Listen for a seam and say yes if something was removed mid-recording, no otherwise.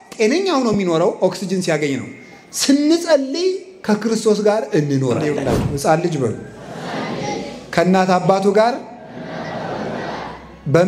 yes